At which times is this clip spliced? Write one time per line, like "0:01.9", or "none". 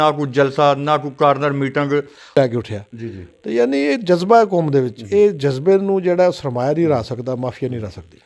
0:02.3